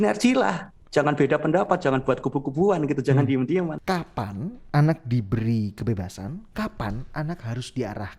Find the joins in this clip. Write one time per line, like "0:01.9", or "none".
0:03.8